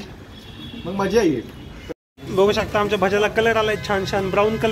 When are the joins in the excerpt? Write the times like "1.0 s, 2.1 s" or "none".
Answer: 2.1 s

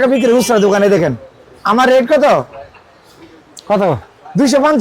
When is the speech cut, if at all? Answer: none

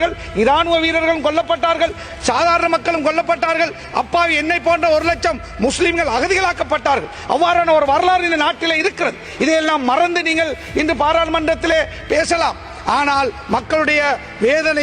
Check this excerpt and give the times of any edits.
none

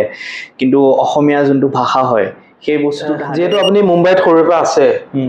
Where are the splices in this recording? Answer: 3.2 s

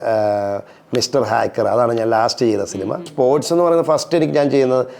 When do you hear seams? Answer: 3.1 s

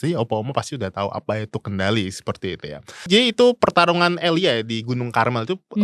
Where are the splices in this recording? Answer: 3.1 s

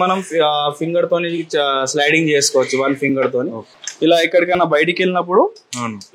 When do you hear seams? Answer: 3.7 s

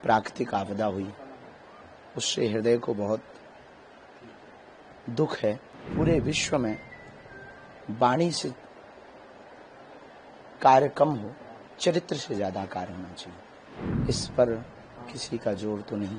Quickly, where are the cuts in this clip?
5.7 s, 13.6 s

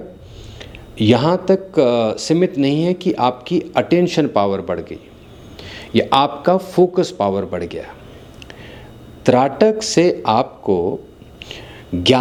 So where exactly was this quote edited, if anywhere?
none

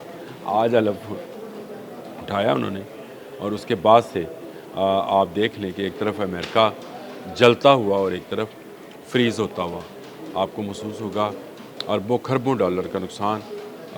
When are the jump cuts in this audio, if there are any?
none

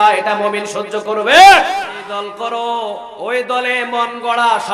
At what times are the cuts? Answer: 2.0 s

